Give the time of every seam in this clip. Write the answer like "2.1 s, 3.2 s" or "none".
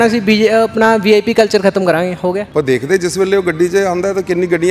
2.5 s